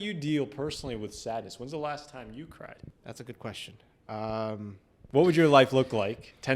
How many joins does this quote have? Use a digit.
2